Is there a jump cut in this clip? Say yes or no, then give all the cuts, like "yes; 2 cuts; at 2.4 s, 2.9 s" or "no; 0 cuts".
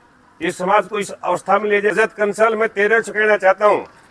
yes; 1 cut; at 1.9 s